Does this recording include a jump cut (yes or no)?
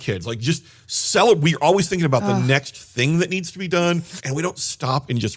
yes